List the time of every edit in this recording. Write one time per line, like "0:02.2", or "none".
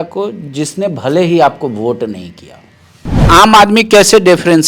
0:03.3